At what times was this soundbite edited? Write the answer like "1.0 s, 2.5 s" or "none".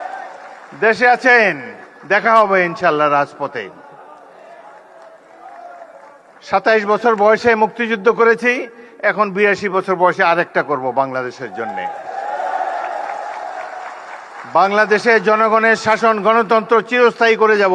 16.6 s